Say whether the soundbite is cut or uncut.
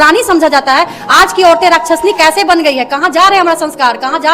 uncut